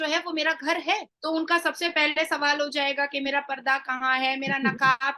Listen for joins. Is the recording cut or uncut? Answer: cut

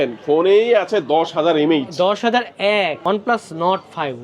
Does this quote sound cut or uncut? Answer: cut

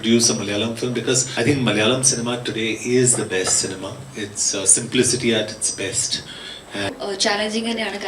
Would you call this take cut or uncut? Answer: cut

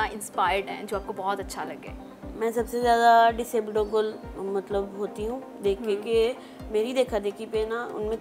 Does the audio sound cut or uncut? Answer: uncut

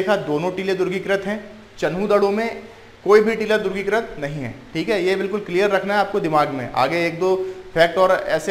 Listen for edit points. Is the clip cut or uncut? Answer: uncut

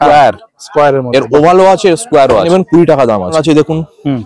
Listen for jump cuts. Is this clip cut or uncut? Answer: cut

